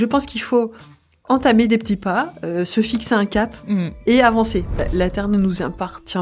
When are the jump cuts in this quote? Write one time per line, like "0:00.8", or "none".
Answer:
0:01.1
0:04.8